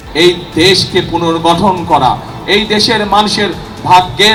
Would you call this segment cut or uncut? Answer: uncut